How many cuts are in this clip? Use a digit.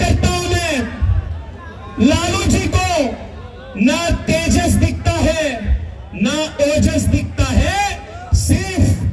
0